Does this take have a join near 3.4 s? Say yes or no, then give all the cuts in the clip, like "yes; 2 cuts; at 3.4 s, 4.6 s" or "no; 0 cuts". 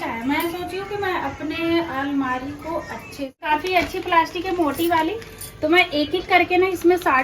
yes; 1 cut; at 3.4 s